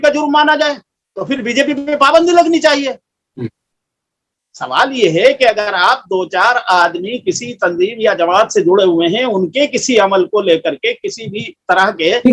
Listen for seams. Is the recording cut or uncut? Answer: uncut